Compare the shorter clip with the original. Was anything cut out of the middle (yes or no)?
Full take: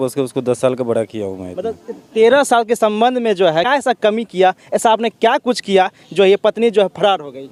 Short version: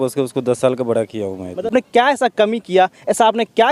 yes